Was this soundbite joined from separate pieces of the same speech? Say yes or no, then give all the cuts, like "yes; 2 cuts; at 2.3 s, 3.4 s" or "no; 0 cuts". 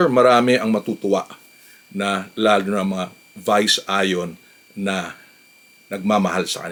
no; 0 cuts